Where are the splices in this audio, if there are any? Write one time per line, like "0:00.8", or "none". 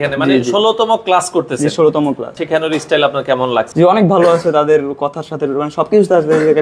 0:02.4
0:03.7